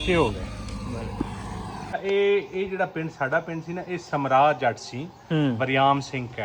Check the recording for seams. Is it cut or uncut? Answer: cut